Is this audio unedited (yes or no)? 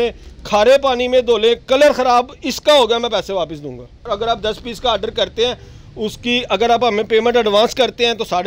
no